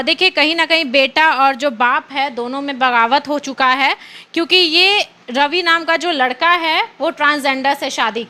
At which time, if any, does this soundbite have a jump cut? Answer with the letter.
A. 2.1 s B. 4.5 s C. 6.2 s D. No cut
D